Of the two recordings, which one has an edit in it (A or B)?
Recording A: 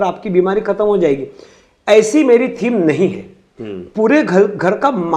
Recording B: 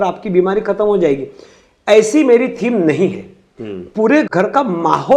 B